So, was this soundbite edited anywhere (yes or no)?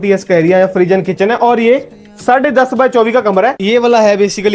yes